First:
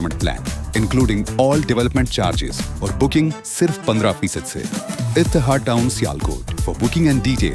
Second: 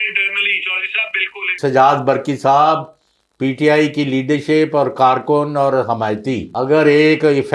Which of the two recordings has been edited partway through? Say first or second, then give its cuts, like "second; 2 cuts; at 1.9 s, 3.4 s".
second; 2 cuts; at 1.5 s, 6.5 s